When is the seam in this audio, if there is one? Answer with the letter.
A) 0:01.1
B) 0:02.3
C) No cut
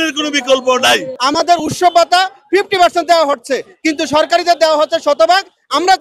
A